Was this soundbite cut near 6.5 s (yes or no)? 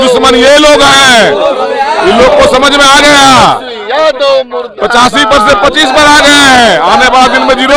no